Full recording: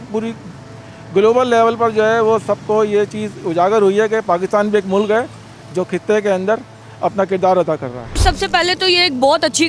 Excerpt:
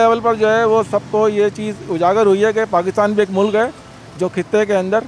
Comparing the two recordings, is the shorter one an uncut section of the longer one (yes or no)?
yes